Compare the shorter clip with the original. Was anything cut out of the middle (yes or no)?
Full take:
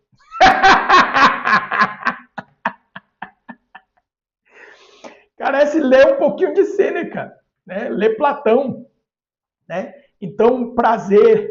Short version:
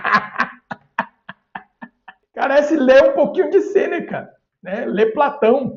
yes